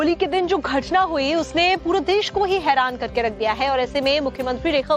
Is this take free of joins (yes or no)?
no